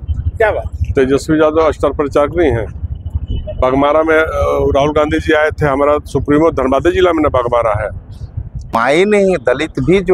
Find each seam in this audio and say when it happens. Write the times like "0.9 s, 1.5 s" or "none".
8.7 s